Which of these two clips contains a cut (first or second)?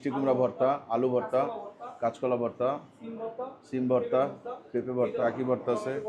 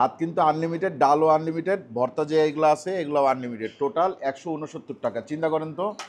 first